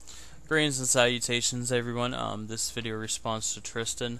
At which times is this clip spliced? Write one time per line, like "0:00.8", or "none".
none